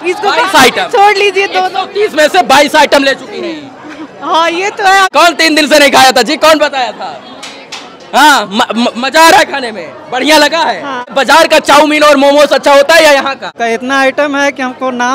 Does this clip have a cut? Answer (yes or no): yes